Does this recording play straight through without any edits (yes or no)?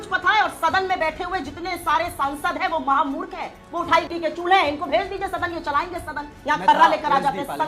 yes